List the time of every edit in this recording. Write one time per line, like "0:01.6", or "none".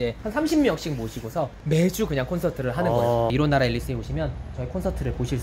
none